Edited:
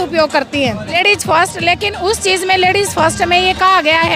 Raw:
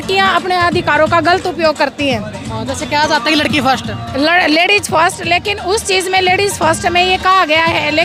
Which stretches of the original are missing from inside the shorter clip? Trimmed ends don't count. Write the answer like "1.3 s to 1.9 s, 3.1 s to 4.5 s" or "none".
2.4 s to 4.6 s